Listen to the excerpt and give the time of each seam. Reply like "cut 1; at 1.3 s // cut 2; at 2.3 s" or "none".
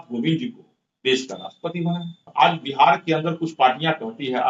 cut 1; at 2.2 s

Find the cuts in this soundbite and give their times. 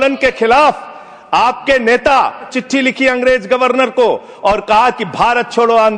cut 1; at 2.6 s

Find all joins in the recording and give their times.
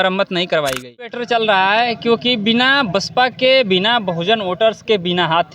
cut 1; at 1.2 s

